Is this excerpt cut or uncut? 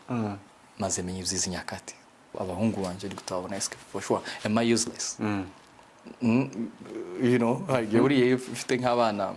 cut